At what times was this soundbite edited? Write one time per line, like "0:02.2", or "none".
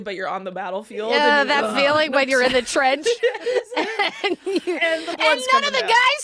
none